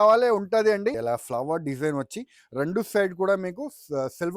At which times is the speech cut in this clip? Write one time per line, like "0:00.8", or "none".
0:01.0